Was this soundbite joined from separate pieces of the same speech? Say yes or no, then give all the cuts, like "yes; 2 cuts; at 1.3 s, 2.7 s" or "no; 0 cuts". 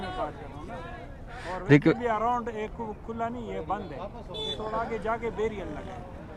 no; 0 cuts